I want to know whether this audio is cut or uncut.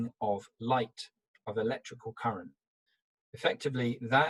uncut